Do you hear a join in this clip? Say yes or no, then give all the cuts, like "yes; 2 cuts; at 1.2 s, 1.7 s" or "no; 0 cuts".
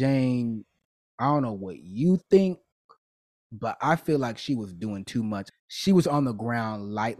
yes; 1 cut; at 5.5 s